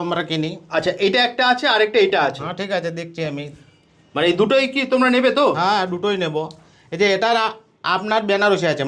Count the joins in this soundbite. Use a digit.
0